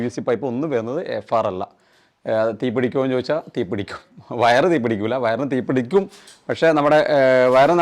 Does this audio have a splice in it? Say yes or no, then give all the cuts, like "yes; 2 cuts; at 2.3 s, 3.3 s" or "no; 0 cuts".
no; 0 cuts